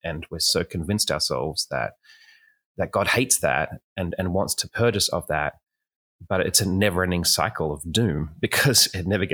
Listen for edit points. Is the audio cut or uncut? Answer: uncut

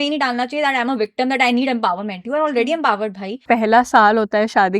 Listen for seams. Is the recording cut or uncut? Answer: cut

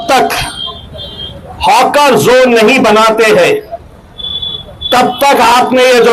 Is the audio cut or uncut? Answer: uncut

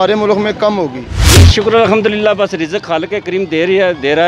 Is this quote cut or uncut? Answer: cut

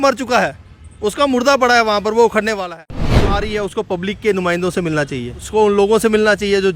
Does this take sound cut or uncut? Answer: cut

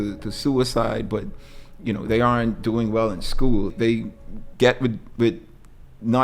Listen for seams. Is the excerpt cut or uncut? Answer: cut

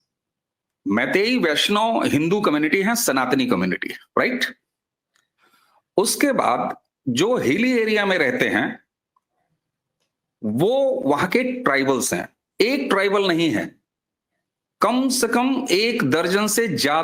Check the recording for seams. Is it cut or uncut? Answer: uncut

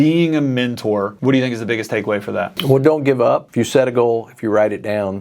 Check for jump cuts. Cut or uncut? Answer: cut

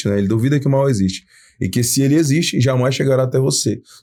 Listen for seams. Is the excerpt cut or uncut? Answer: uncut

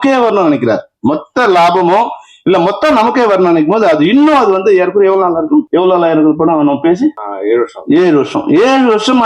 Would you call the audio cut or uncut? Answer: cut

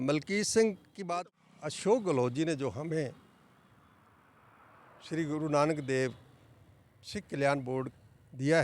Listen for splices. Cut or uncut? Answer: cut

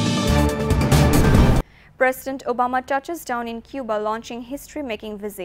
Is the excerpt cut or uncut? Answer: cut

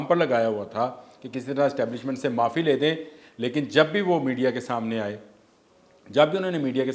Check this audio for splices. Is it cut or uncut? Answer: uncut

